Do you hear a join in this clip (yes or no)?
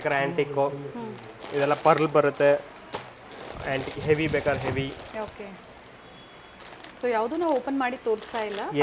no